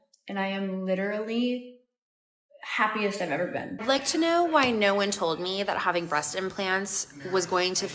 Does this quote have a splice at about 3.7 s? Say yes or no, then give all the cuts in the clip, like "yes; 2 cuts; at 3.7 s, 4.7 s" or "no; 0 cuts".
yes; 1 cut; at 3.7 s